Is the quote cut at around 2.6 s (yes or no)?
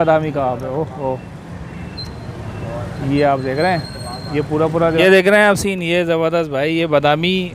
no